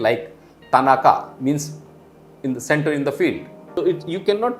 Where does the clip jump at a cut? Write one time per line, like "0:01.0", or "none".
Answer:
0:03.6